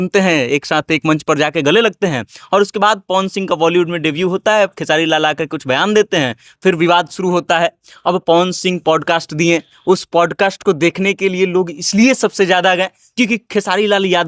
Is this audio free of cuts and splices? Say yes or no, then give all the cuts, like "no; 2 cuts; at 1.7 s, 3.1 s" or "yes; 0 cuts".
yes; 0 cuts